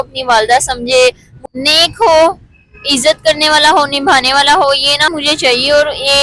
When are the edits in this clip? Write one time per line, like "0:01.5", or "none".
0:01.3
0:05.1